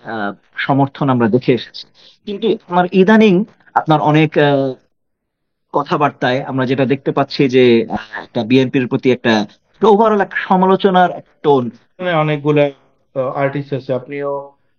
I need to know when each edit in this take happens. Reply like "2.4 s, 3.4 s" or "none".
12.0 s